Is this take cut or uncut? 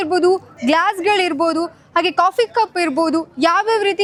uncut